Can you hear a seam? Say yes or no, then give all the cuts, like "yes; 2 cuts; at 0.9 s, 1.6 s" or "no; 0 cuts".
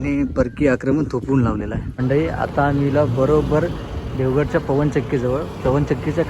yes; 1 cut; at 1.9 s